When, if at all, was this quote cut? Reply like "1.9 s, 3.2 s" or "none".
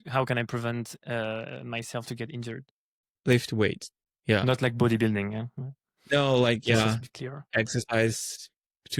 none